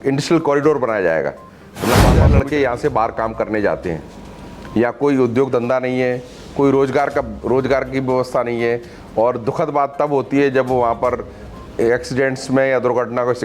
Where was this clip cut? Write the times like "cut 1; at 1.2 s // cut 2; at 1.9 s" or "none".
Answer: cut 1; at 2.2 s